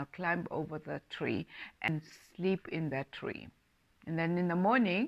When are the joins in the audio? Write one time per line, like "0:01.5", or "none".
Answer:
0:01.9